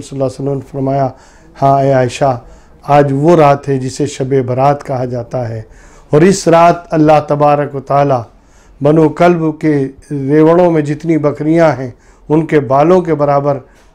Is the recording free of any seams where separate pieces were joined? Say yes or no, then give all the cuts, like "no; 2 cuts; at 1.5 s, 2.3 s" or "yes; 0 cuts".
yes; 0 cuts